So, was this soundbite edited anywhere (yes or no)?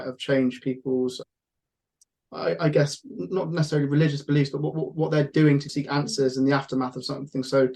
yes